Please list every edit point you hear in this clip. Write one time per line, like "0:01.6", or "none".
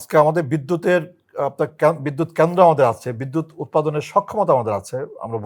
none